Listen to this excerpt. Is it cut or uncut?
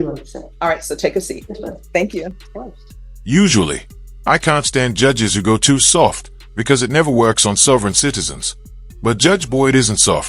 uncut